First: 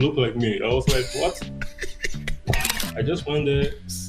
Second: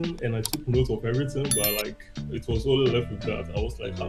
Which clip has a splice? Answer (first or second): first